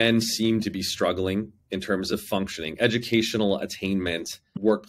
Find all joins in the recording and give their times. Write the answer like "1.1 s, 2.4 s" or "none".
2.1 s